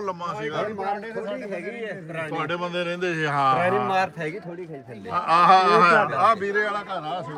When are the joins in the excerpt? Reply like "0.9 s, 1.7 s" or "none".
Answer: none